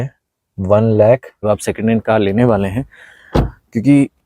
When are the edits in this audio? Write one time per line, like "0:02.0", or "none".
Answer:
0:01.3